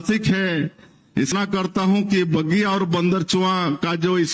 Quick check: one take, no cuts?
no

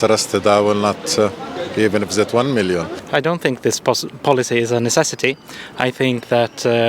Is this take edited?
yes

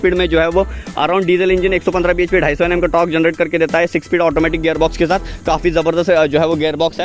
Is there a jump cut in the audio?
no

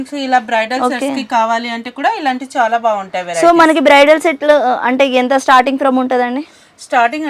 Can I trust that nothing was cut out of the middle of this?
yes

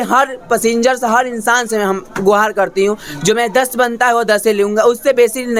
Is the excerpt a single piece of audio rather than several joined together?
yes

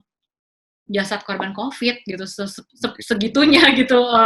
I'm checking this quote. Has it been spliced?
no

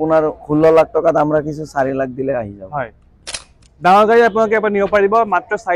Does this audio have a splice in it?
no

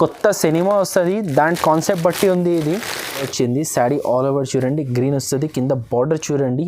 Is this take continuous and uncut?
no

